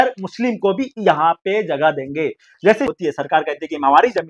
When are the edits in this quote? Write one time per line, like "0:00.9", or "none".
0:02.9